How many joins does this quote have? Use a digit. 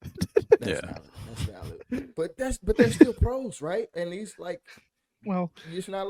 0